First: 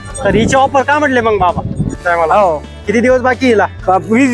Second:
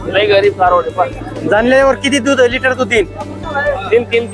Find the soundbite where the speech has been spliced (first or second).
first